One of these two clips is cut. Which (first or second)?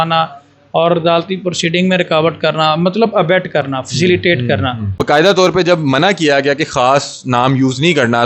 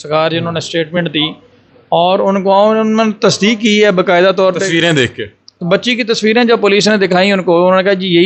first